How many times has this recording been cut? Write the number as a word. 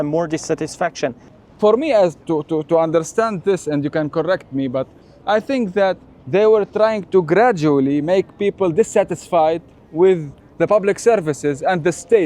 one